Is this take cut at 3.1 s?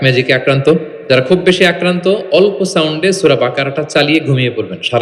no; 1 cut; at 0.9 s

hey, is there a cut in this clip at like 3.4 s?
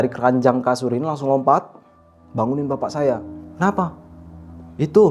yes; 1 cut; at 3.4 s

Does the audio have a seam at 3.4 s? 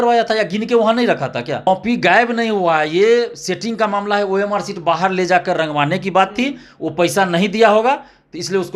no; 1 cut; at 1.7 s

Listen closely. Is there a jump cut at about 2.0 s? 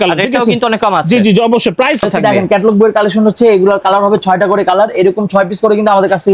yes; 1 cut; at 2.0 s

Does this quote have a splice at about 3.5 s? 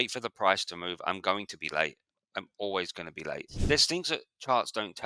yes; 1 cut; at 3.5 s

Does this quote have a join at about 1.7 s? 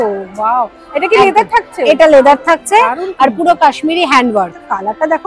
no; 0 cuts

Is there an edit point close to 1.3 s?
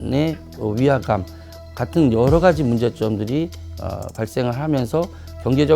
no; 0 cuts

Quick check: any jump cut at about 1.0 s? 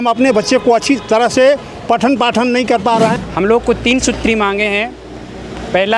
no; 1 cut; at 3.2 s

